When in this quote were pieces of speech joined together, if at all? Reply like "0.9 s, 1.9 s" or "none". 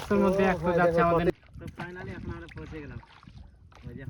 1.3 s